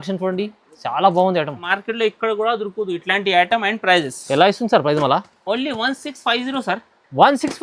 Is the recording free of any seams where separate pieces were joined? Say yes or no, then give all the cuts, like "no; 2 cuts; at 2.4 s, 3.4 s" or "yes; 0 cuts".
no; 1 cut; at 1.7 s